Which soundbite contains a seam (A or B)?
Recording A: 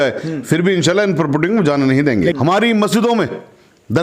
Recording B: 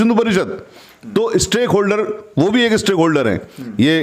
A